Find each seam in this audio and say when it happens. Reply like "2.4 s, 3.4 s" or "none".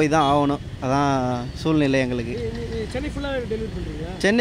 none